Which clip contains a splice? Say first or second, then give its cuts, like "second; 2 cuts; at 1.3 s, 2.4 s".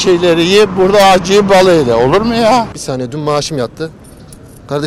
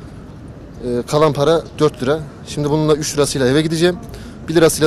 first; 1 cut; at 2.7 s